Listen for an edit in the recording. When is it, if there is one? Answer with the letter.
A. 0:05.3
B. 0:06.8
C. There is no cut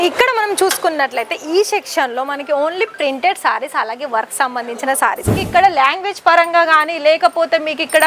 A